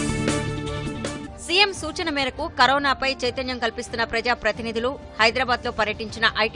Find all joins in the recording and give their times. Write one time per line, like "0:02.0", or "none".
0:01.2